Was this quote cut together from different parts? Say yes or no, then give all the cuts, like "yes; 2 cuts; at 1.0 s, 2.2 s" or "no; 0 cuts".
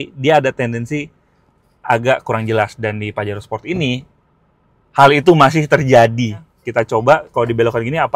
yes; 1 cut; at 6.5 s